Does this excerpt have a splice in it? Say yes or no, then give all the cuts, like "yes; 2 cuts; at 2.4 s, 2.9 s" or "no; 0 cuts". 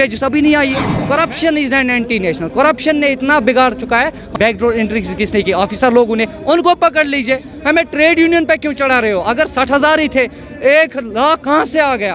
yes; 2 cuts; at 0.9 s, 4.3 s